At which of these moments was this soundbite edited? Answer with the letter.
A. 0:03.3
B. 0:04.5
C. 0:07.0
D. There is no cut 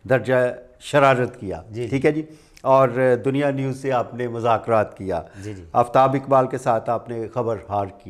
D